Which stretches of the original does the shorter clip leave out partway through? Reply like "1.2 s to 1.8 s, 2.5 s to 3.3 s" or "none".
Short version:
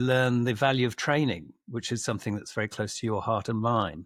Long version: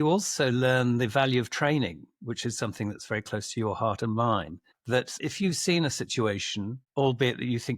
none